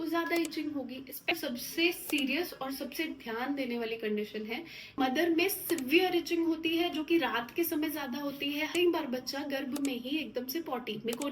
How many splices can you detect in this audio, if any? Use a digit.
3